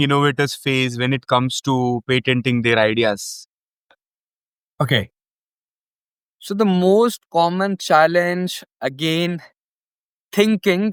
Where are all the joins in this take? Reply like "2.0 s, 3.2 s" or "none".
none